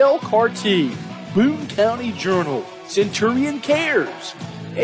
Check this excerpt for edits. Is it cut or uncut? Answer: uncut